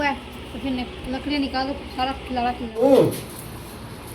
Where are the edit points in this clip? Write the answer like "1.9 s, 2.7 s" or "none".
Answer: 2.7 s